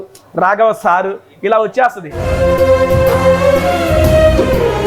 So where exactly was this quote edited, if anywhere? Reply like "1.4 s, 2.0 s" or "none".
2.1 s